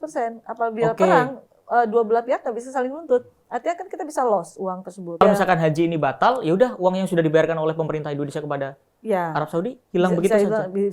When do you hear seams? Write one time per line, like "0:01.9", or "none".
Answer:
0:05.2